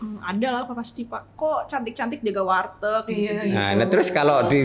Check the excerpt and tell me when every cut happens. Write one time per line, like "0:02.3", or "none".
0:01.3